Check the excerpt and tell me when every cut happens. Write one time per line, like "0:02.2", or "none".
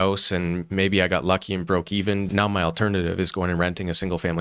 0:02.3